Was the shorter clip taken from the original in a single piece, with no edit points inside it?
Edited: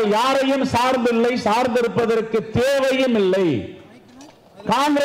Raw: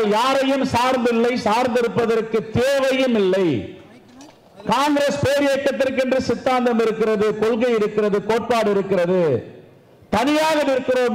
yes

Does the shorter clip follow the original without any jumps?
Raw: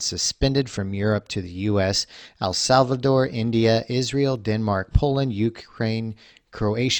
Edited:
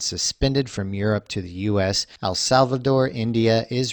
no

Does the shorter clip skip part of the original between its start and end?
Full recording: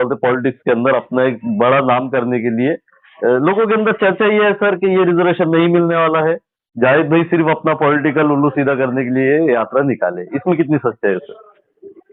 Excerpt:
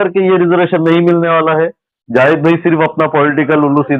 no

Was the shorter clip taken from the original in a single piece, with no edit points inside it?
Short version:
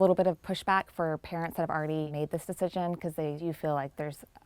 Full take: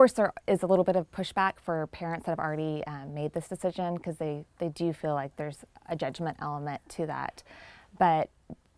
no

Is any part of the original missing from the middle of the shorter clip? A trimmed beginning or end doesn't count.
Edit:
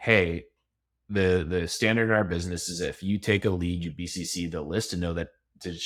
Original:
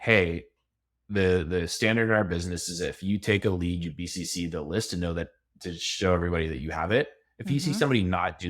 no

